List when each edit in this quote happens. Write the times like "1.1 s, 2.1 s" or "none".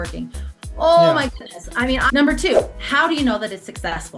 2.0 s